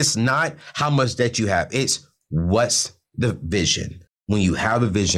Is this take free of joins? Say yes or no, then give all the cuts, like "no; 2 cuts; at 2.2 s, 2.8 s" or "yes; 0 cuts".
yes; 0 cuts